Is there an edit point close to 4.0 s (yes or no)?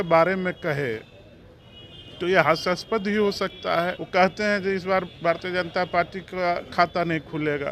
yes